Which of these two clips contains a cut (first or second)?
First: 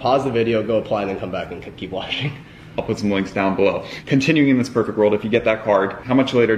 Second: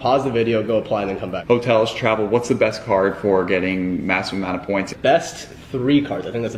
second